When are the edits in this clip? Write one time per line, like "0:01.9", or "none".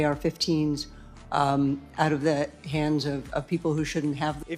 none

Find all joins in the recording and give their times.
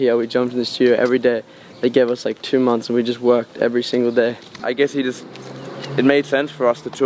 0:04.5

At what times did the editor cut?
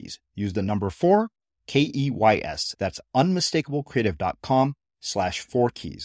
none

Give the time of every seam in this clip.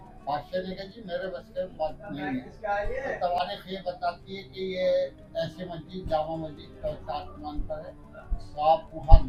none

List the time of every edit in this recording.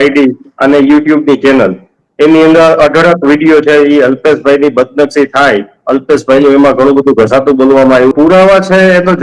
0:08.1

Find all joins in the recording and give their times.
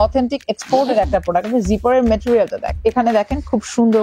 0:02.7

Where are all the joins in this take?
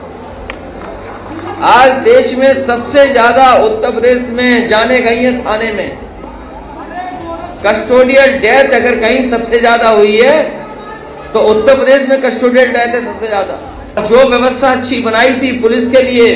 0:01.5
0:14.0

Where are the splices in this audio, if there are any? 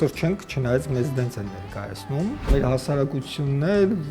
0:02.5

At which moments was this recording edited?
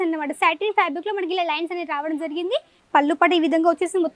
0:02.8

